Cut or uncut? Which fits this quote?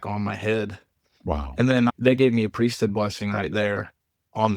cut